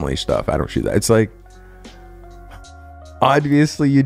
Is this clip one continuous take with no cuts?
yes; 0 cuts

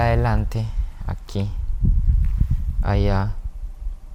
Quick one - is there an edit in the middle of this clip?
no; 0 cuts

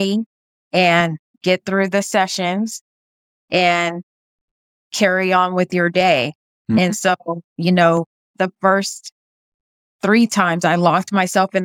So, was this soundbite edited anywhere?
yes; 2 cuts; at 7.4 s, 8.3 s

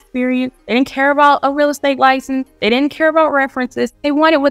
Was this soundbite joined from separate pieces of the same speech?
no; 0 cuts

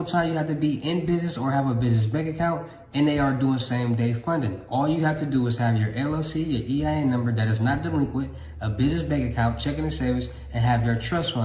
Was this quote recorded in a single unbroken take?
no; 1 cut; at 4.6 s

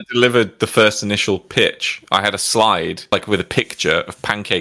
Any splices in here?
no; 0 cuts

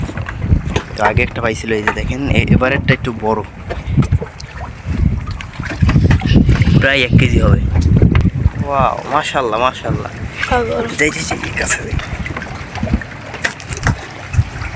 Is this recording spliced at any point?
yes; 1 cut; at 8.2 s

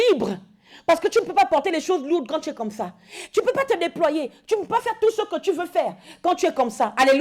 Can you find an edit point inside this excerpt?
no; 0 cuts

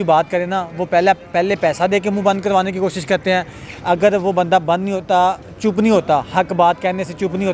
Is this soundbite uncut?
yes; 0 cuts

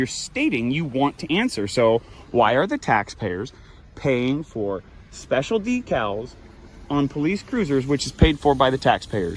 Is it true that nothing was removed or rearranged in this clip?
yes; 0 cuts

